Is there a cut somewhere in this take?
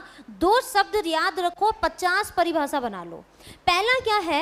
no; 0 cuts

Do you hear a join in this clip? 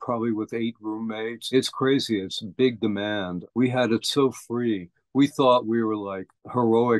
yes; 1 cut; at 1.4 s

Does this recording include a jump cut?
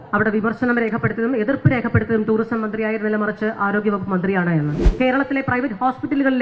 yes; 1 cut; at 4.8 s

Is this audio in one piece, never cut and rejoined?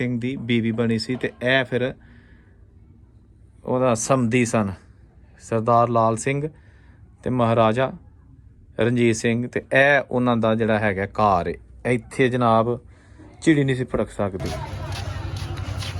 no; 1 cut; at 14.5 s

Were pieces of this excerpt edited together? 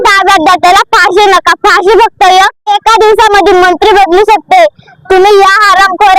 yes; 1 cut; at 2.6 s

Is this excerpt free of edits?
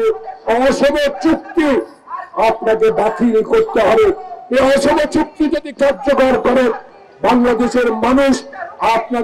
yes; 0 cuts

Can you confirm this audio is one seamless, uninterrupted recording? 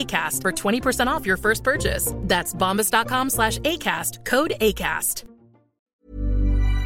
no; 1 cut; at 5.8 s

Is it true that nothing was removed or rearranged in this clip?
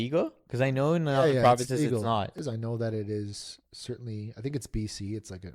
no; 1 cut; at 2.3 s

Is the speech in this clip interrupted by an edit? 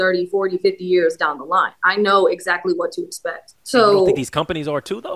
yes; 1 cut; at 3.5 s

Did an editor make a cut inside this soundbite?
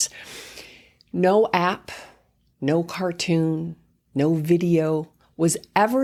no; 0 cuts

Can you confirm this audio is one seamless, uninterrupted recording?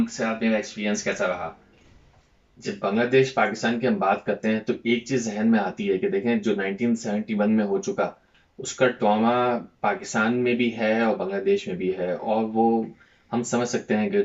no; 1 cut; at 1.7 s

